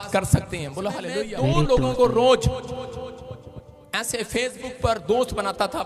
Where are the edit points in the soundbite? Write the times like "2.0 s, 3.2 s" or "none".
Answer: 1.0 s